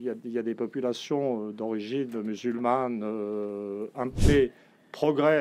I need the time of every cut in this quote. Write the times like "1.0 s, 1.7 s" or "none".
4.1 s